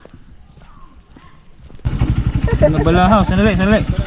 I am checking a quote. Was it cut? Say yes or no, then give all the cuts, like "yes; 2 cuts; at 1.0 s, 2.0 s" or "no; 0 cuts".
yes; 1 cut; at 1.9 s